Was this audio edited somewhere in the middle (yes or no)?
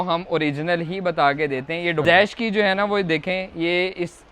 yes